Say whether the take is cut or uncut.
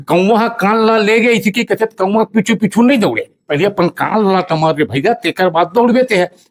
uncut